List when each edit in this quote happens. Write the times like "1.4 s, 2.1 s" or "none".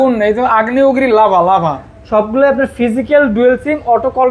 1.9 s

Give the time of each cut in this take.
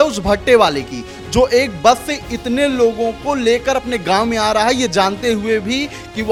none

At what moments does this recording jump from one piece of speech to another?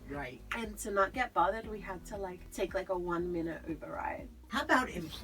2.4 s, 4.4 s

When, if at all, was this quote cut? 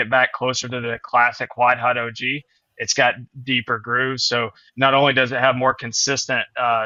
none

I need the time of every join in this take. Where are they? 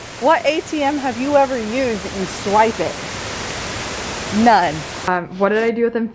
5.1 s

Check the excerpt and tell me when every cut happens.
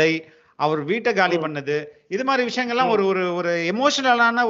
none

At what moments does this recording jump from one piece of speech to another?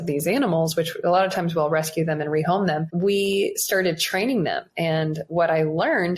2.9 s

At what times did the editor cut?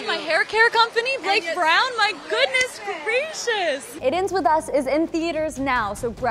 3.9 s

